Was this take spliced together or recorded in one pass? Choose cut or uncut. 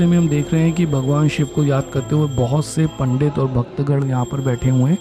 uncut